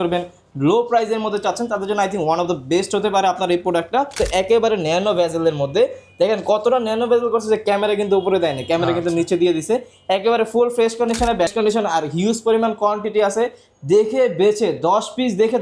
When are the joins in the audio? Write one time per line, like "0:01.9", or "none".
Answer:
0:04.2
0:11.5